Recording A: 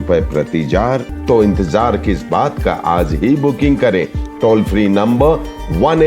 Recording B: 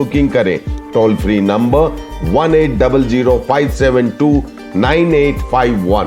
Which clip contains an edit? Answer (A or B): A